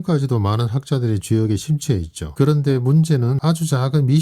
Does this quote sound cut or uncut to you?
cut